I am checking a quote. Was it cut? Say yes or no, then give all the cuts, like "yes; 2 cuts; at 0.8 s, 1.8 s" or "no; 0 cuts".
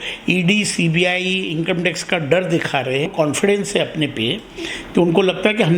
yes; 1 cut; at 3.1 s